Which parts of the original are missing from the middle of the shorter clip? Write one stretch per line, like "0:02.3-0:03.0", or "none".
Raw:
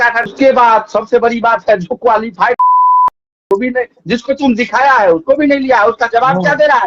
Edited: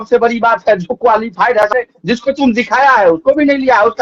0:02.6-0:03.6